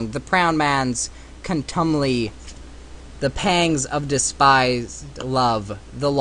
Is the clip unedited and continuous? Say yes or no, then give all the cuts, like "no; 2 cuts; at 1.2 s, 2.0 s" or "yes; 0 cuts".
no; 1 cut; at 2.4 s